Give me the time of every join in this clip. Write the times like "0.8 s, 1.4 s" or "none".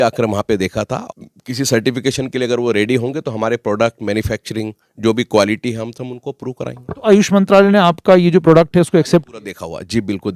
1.0 s